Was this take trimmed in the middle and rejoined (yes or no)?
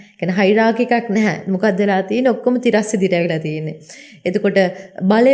no